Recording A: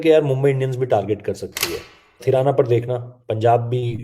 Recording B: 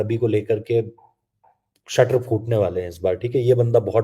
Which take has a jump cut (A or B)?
A